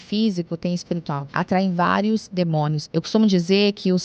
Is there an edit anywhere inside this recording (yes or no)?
yes